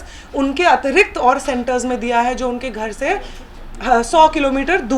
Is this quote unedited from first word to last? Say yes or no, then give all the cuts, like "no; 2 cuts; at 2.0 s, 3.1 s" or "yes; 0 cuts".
yes; 0 cuts